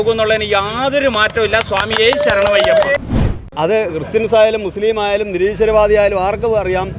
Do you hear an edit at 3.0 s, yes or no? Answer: yes